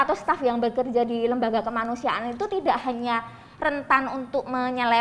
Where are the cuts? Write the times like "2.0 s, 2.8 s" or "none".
none